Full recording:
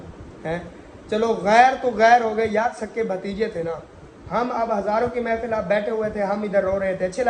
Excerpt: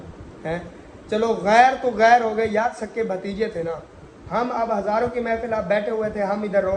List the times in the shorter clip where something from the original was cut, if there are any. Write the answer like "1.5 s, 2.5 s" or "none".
none